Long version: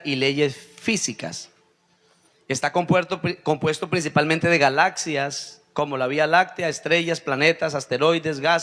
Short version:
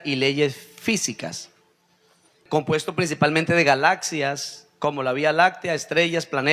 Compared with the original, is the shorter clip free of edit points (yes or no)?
no